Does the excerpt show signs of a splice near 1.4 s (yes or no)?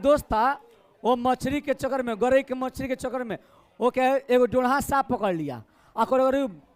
no